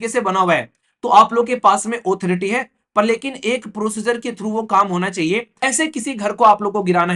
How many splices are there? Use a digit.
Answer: 1